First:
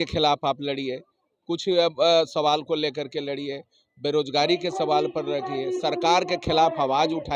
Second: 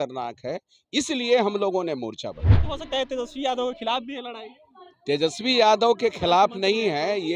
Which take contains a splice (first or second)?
second